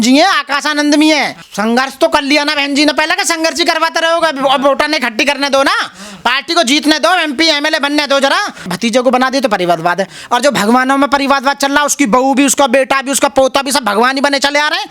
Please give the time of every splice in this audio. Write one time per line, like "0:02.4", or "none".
0:01.4
0:08.7